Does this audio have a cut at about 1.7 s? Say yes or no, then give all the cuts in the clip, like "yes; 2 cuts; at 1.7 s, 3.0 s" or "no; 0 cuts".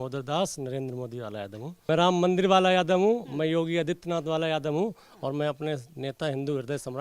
yes; 1 cut; at 1.7 s